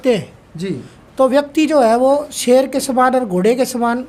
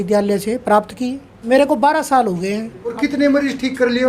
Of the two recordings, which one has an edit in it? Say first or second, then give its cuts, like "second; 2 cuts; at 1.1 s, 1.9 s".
second; 2 cuts; at 1.3 s, 2.9 s